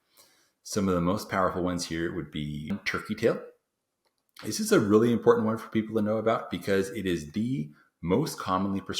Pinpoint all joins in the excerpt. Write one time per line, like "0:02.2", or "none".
0:02.7